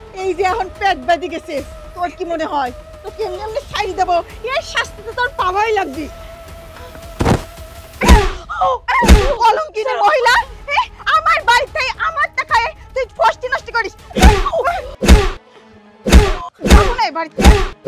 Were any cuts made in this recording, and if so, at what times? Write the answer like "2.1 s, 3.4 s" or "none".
14.9 s, 16.5 s